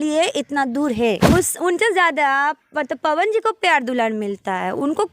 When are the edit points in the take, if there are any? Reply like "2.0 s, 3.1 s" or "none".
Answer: 1.3 s